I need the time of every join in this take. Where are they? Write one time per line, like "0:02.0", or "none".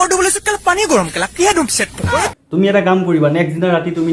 0:02.4